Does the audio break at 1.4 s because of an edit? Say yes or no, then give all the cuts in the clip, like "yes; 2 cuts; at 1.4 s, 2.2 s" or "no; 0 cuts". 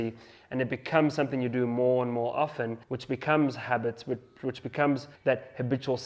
no; 2 cuts; at 2.9 s, 5.1 s